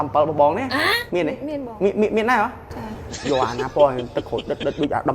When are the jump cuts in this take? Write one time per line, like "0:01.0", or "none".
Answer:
0:03.1